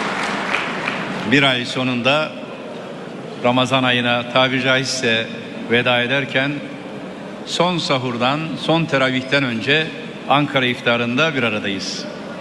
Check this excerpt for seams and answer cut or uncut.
cut